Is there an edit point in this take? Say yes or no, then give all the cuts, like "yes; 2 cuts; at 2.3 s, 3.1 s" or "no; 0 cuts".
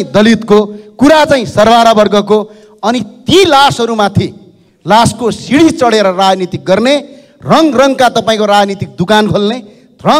no; 0 cuts